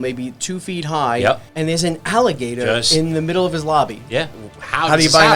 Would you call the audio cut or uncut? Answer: cut